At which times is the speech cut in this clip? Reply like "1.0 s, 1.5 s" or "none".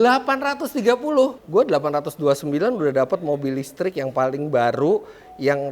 1.4 s